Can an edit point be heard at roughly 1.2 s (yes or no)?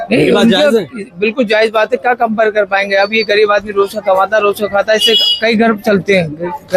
no